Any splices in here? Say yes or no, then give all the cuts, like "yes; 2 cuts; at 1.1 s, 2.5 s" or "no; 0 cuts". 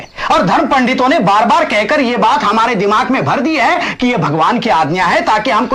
no; 0 cuts